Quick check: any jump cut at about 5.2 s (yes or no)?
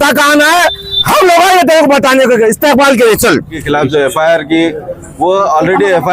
no